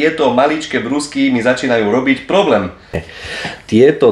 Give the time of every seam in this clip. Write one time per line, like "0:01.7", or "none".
0:03.1